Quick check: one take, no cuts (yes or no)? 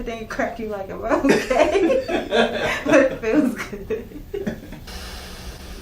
no